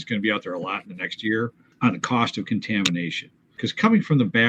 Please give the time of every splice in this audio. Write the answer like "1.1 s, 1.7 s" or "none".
1.6 s, 3.5 s